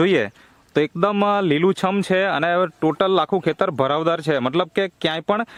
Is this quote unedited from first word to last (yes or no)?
yes